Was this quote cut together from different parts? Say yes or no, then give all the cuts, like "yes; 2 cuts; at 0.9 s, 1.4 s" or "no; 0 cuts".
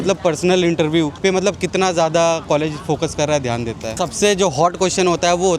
yes; 2 cuts; at 1.1 s, 3.9 s